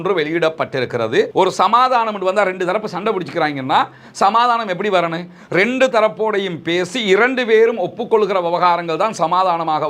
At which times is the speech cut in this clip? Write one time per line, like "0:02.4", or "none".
0:01.3